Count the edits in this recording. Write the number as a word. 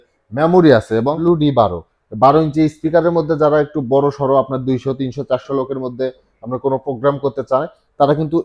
one